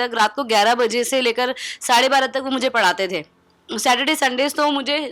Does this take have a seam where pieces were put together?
no; 0 cuts

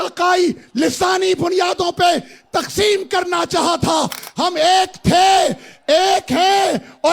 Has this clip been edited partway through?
no; 0 cuts

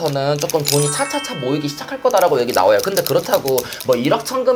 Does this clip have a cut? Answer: no; 0 cuts

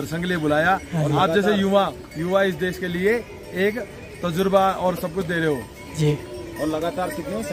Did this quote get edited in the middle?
no; 0 cuts

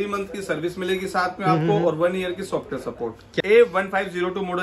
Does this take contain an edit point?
yes; 1 cut; at 3.3 s

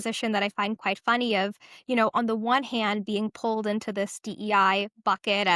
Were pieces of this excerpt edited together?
no; 0 cuts

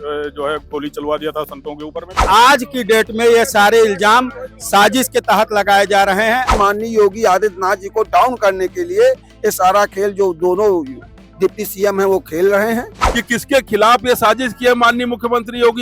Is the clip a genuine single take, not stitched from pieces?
no; 3 cuts; at 2.2 s, 6.5 s, 13.0 s

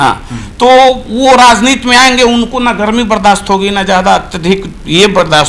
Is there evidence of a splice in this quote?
no; 0 cuts

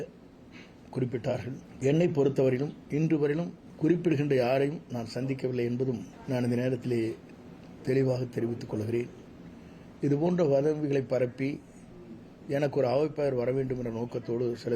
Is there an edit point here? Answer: yes; 3 cuts; at 1.7 s, 3.6 s, 6.1 s

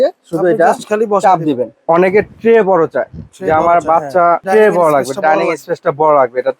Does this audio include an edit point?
yes; 1 cut; at 1.8 s

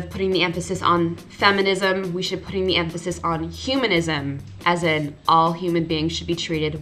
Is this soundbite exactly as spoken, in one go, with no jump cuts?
yes; 0 cuts

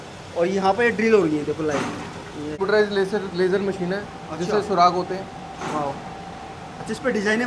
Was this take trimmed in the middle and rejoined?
yes; 1 cut; at 2.6 s

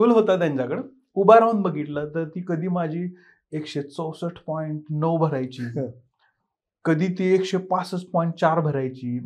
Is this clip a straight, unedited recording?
yes; 0 cuts

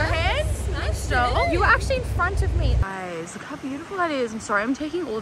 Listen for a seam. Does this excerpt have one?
yes; 1 cut; at 2.8 s

